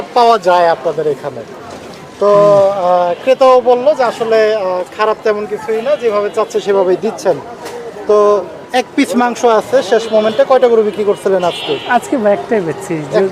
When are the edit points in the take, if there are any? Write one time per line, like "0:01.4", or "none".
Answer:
none